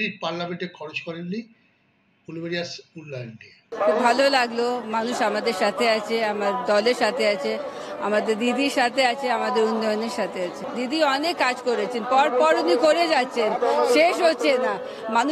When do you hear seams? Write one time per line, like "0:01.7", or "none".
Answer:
0:03.7

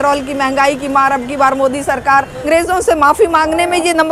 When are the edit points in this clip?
0:02.5

